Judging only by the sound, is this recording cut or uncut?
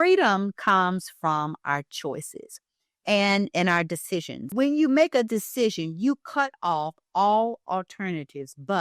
cut